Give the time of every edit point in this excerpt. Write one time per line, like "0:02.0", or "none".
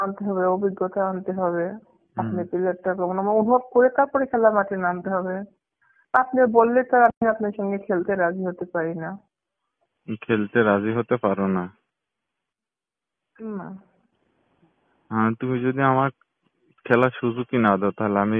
none